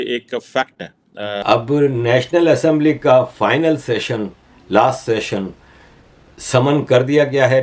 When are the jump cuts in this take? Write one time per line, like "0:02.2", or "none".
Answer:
0:01.4